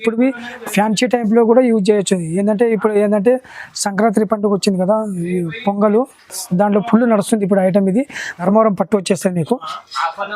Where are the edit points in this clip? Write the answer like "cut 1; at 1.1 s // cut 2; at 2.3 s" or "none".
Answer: cut 1; at 8.4 s